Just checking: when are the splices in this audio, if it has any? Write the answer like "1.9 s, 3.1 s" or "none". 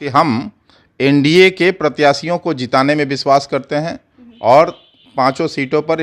none